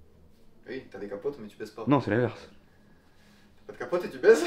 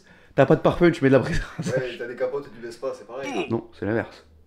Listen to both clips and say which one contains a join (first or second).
second